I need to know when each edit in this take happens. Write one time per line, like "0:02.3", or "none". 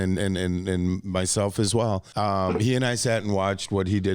0:02.1